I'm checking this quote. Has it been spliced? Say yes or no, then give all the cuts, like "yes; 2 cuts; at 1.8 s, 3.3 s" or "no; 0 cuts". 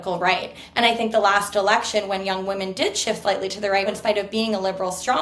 yes; 1 cut; at 3.9 s